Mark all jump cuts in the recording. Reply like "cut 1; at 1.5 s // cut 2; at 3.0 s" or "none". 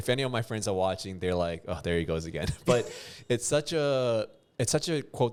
none